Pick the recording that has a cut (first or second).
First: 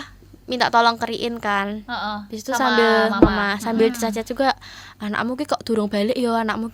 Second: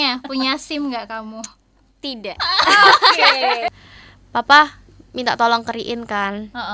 second